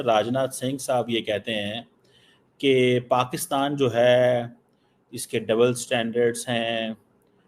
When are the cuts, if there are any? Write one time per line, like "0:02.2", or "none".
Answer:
none